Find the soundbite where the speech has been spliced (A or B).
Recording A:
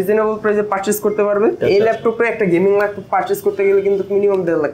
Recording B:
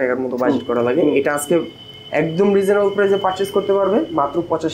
A